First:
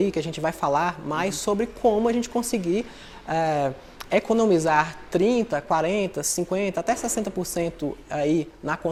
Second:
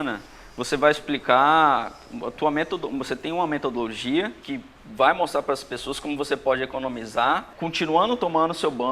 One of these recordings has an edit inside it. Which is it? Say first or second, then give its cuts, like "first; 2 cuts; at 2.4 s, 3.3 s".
second; 2 cuts; at 4.4 s, 7.5 s